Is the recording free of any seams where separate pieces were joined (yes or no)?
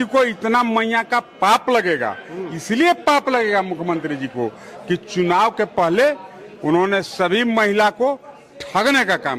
yes